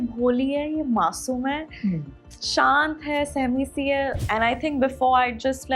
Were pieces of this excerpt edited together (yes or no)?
yes